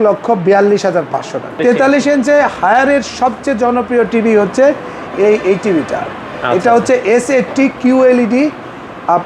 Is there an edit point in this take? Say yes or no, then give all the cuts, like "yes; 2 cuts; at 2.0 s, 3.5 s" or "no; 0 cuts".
yes; 1 cut; at 1.6 s